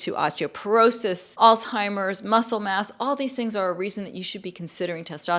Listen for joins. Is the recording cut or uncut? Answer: cut